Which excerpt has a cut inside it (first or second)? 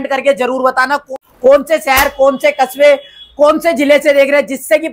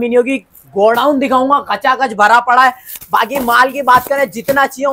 first